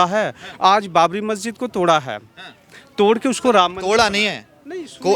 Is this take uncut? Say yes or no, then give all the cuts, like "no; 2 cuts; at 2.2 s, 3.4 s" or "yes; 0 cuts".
yes; 0 cuts